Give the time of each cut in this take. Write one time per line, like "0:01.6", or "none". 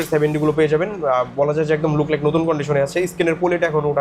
none